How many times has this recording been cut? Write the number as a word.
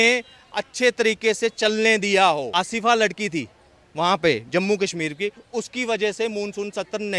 one